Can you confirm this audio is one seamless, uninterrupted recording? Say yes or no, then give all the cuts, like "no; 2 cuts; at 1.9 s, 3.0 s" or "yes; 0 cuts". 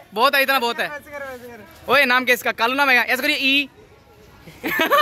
yes; 0 cuts